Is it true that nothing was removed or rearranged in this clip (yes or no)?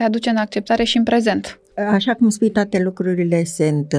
no